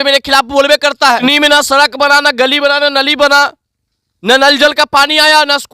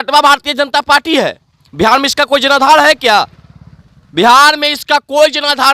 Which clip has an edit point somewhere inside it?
first; 1 cut; at 1.2 s

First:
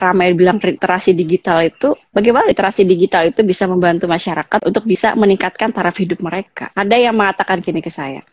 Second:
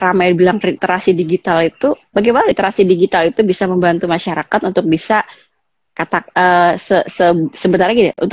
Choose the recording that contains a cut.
first; 2 cuts; at 4.8 s, 6.6 s

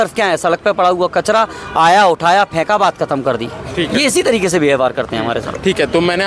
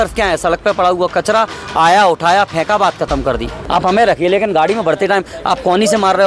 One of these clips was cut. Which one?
second; 1 cut; at 3.6 s

